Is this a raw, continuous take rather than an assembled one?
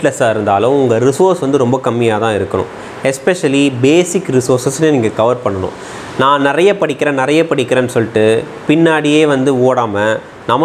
yes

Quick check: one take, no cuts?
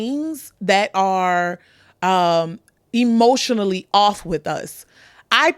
yes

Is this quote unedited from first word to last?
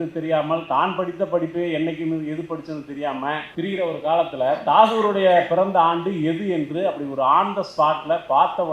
no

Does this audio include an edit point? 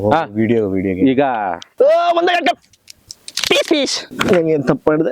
yes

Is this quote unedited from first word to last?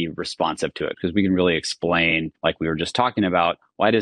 no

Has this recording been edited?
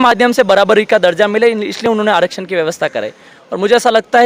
no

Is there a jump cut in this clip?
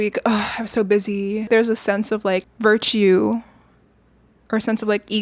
yes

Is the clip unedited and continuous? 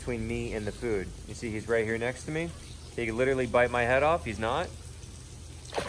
yes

